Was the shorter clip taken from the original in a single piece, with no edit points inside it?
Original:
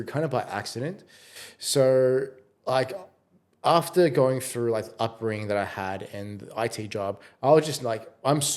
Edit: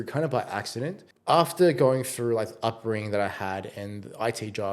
no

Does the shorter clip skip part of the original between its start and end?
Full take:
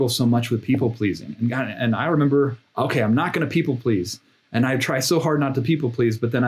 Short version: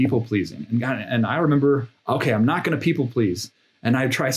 no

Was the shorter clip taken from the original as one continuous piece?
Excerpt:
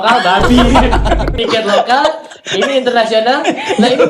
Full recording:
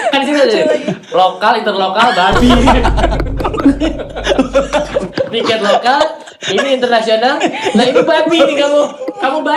no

